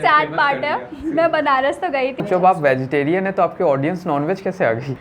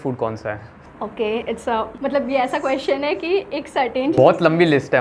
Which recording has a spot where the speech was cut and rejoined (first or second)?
first